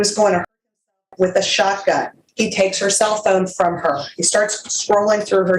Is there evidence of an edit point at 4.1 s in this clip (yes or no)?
no